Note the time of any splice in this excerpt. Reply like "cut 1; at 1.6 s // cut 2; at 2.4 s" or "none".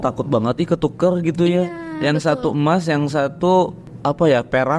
cut 1; at 3.9 s